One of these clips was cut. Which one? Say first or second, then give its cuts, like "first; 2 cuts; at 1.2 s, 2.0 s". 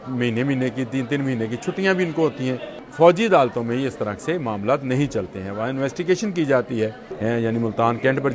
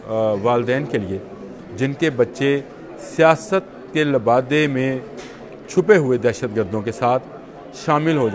first; 2 cuts; at 2.8 s, 7.0 s